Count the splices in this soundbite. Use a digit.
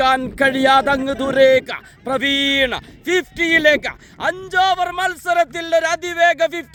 0